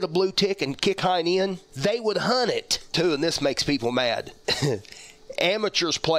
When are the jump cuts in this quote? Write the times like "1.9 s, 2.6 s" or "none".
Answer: 2.9 s